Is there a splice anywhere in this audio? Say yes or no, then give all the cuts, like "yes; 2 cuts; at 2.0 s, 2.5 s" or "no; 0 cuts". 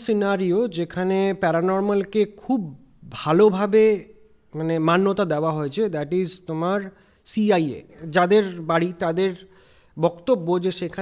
yes; 1 cut; at 8.0 s